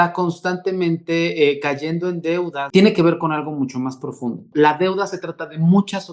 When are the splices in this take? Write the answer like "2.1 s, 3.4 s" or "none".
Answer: 2.6 s, 4.4 s